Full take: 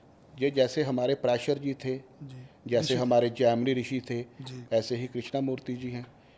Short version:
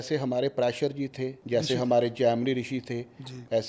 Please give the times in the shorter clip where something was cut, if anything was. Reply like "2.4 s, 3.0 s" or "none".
1.4 s